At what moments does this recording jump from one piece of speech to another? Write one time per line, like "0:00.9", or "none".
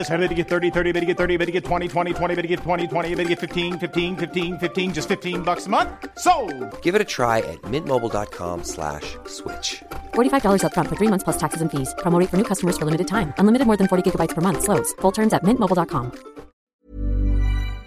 0:16.8